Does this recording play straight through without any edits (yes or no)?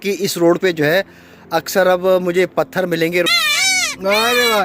no